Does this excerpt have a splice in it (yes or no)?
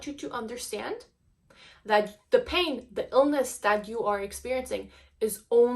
no